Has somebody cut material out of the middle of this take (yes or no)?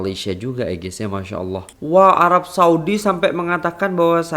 yes